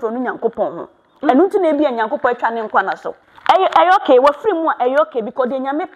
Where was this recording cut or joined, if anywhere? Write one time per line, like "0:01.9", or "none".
0:03.1